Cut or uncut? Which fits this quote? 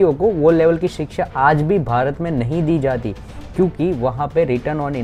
uncut